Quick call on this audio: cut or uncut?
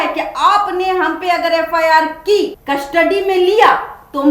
cut